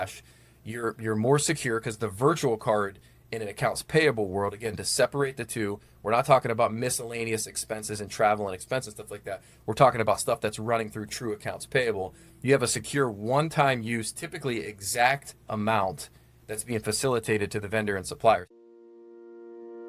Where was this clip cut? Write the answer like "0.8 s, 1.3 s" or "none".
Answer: 18.5 s